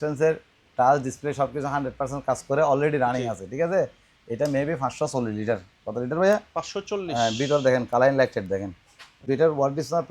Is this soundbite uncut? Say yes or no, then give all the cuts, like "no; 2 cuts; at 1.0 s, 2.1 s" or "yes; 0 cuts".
no; 1 cut; at 9.1 s